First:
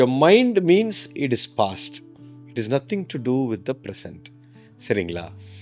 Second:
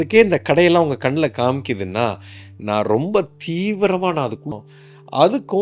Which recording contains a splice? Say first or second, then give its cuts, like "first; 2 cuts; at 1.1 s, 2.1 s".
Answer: second; 1 cut; at 4.5 s